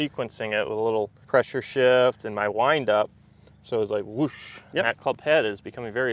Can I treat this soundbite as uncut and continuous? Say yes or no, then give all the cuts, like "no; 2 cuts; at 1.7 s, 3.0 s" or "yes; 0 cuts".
no; 2 cuts; at 1.2 s, 5.0 s